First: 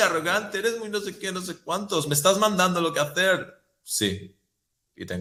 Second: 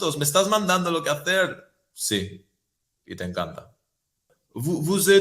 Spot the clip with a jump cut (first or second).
second